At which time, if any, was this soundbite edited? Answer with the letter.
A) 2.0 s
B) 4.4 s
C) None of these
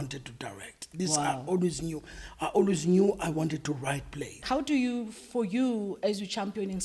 B